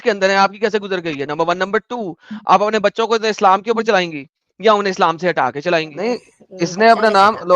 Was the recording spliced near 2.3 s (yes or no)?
no